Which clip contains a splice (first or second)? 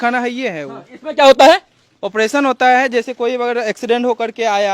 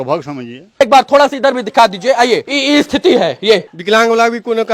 second